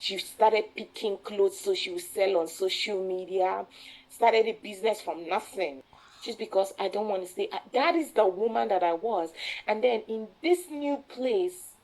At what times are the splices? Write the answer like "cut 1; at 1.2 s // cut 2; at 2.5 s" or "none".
cut 1; at 5.8 s